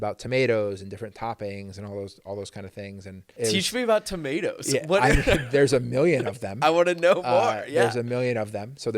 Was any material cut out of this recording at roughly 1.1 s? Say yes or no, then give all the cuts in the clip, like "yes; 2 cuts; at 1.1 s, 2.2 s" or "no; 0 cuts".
no; 1 cut; at 3.2 s